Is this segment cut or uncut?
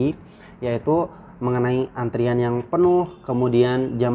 uncut